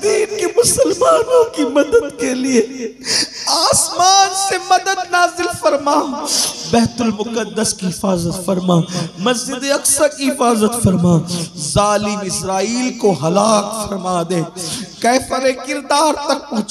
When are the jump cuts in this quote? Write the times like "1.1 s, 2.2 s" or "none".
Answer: none